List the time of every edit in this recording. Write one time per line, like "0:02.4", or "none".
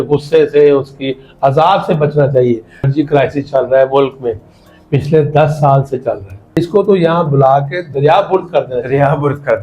0:02.9
0:06.6